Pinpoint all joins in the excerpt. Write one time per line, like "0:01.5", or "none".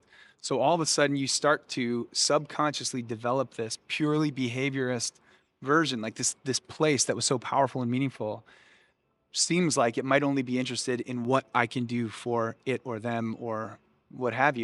none